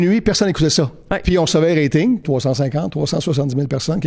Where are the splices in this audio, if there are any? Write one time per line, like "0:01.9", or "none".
0:02.2